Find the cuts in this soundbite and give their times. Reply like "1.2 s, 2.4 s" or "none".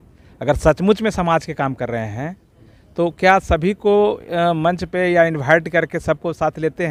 none